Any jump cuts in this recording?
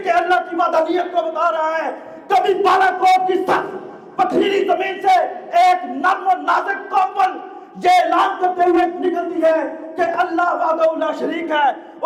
no; 0 cuts

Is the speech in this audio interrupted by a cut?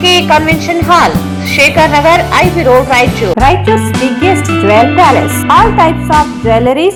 no; 0 cuts

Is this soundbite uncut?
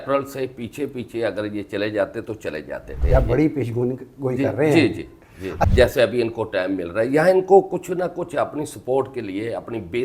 no; 2 cuts; at 3.0 s, 5.6 s

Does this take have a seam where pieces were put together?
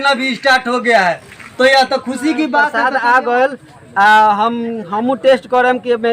yes; 1 cut; at 2.7 s

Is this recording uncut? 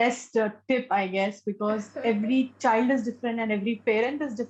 yes; 0 cuts

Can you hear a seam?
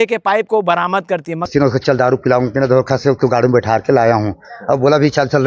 yes; 1 cut; at 1.5 s

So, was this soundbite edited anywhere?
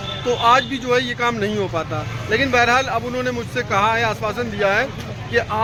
no; 0 cuts

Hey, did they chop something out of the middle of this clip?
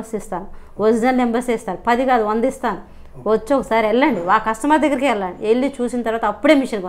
no; 0 cuts

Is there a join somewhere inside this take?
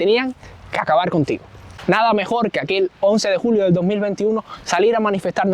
yes; 1 cut; at 1.6 s

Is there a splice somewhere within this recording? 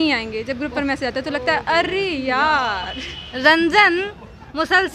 yes; 1 cut; at 3.3 s

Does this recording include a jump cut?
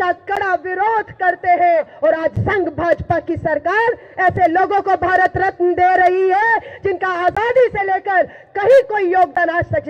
yes; 1 cut; at 1.9 s

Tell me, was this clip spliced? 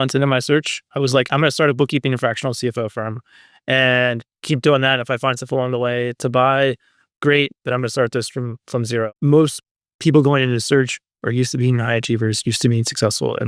yes; 1 cut; at 9.1 s

